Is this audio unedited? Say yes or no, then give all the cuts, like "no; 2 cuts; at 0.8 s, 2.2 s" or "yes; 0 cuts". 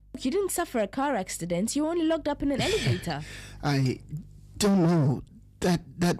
no; 1 cut; at 2.3 s